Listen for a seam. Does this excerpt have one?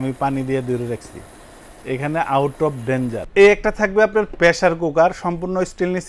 yes; 1 cut; at 3.2 s

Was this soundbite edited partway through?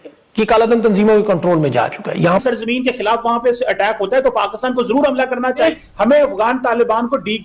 yes; 1 cut; at 2.4 s

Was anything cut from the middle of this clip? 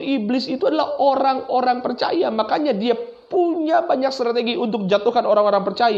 no; 0 cuts

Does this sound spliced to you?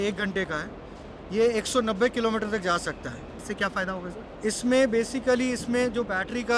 yes; 1 cut; at 3.3 s

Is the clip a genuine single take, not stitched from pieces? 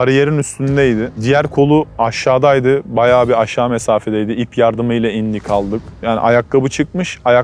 no; 2 cuts; at 1.1 s, 5.9 s

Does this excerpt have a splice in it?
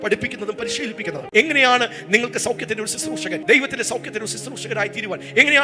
no; 0 cuts

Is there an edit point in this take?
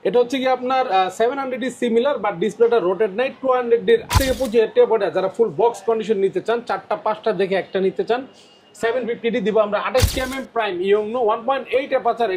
yes; 2 cuts; at 4.1 s, 10.1 s

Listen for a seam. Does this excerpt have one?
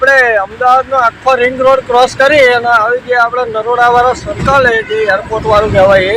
no; 0 cuts

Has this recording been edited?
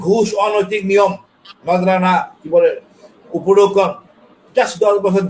no; 0 cuts

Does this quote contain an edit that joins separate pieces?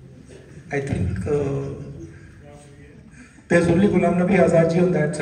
no; 0 cuts

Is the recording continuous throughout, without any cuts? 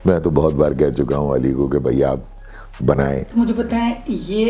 no; 1 cut; at 3.2 s

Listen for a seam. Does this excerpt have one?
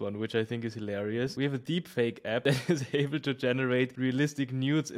yes; 3 cuts; at 1.3 s, 2.4 s, 3.9 s

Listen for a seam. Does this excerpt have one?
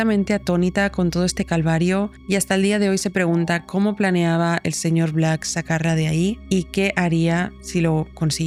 no; 0 cuts

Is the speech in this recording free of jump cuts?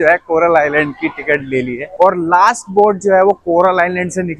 no; 1 cut; at 1.9 s

